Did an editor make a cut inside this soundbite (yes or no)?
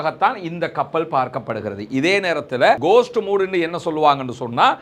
yes